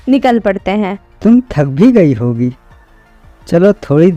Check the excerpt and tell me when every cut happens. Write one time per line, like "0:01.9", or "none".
0:01.0